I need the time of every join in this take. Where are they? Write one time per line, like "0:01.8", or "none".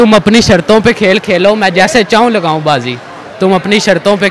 none